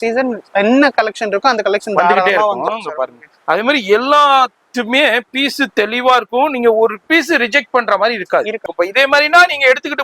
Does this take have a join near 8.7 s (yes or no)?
yes